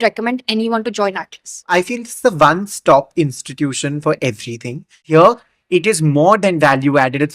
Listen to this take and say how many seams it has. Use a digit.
2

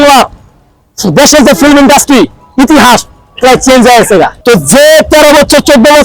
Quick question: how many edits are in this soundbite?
1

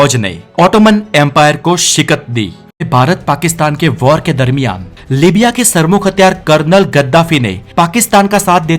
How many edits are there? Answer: 1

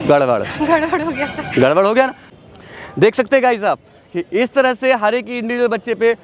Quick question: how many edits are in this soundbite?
1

